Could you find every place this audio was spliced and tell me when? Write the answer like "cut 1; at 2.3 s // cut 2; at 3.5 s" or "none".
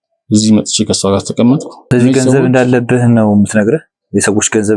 cut 1; at 1.7 s